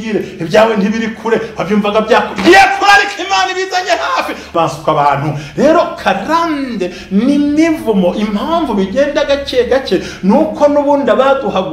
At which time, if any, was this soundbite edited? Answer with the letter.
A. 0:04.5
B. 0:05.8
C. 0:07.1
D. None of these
A